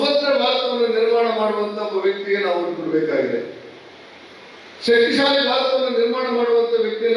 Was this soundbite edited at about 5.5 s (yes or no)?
no